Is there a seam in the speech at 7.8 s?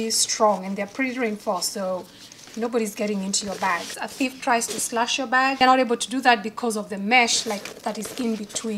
no; 2 cuts; at 4.0 s, 5.6 s

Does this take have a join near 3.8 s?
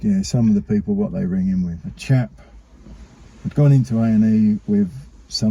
no; 1 cut; at 1.8 s

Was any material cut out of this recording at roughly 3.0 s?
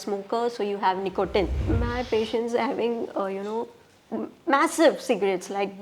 no; 1 cut; at 1.6 s

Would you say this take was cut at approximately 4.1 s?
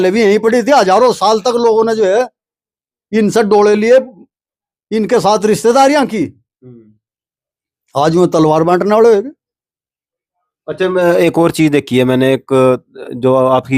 no; 0 cuts

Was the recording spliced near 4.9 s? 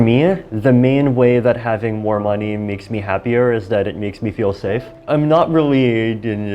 yes; 1 cut; at 4.9 s

